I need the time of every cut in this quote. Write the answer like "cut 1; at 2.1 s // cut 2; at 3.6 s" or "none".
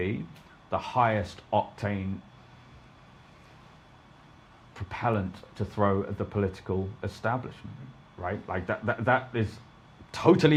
none

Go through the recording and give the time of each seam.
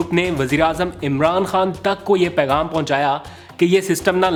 none

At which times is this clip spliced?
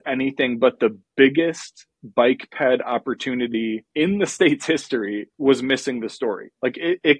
cut 1; at 3.9 s

